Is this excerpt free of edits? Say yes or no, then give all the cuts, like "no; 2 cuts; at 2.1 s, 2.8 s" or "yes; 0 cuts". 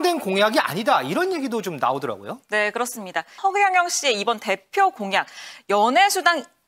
no; 1 cut; at 3.3 s